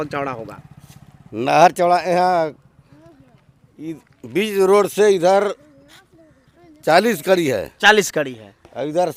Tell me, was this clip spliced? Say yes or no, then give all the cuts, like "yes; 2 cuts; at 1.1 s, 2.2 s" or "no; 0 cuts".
no; 0 cuts